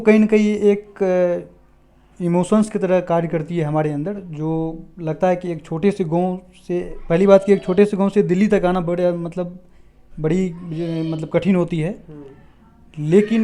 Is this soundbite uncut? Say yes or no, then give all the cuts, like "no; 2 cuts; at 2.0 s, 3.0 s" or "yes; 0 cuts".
yes; 0 cuts